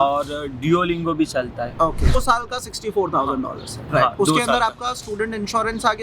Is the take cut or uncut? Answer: cut